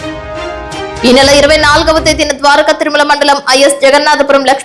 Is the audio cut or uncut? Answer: uncut